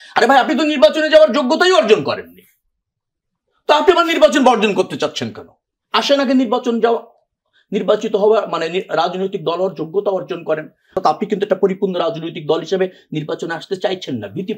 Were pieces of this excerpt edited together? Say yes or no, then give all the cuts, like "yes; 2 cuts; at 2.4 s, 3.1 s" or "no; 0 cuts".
yes; 1 cut; at 10.9 s